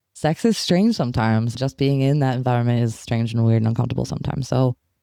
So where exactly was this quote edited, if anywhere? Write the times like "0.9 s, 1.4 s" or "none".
none